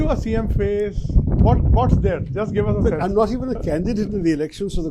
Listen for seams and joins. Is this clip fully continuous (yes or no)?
yes